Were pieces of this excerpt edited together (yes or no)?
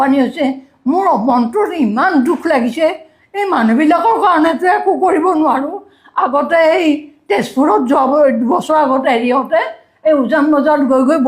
no